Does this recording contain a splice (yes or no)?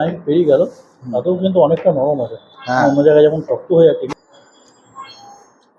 yes